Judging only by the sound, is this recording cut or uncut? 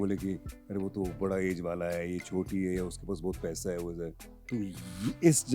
cut